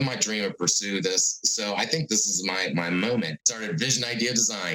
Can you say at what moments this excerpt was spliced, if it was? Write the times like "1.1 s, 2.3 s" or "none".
3.4 s